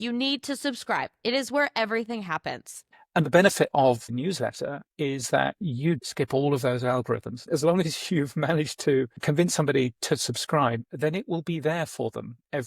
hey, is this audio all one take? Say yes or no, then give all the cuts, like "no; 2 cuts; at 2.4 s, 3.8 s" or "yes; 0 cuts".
no; 4 cuts; at 2.8 s, 4.1 s, 6.0 s, 7.4 s